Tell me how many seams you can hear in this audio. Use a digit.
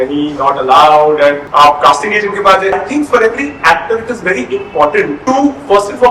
3